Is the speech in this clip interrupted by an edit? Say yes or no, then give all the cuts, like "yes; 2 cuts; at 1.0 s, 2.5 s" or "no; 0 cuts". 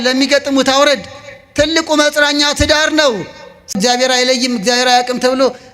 yes; 1 cut; at 3.8 s